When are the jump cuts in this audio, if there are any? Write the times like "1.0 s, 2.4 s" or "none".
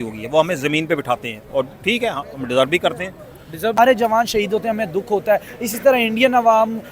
3.8 s

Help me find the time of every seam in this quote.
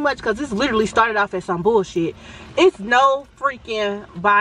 none

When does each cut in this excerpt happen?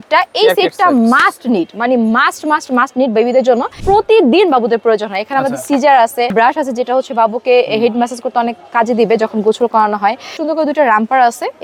3.8 s, 6.3 s, 10.3 s

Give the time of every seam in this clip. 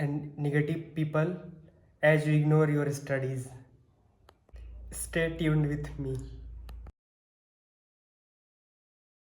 none

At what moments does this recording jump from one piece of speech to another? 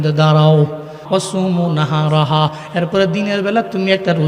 1.0 s

